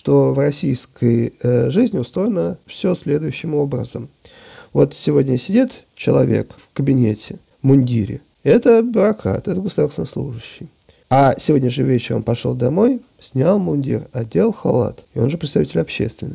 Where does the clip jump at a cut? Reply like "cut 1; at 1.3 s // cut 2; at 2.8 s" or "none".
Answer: none